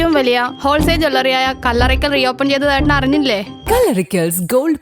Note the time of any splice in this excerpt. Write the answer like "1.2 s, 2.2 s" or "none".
3.6 s